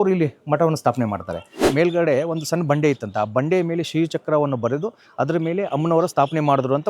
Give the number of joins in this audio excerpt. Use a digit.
1